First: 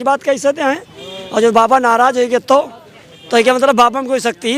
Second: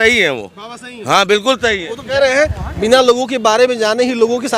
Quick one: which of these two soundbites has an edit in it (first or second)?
second